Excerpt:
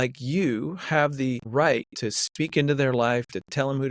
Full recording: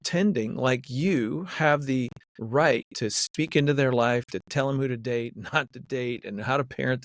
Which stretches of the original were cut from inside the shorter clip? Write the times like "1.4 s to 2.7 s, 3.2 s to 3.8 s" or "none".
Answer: 2.1 s to 2.4 s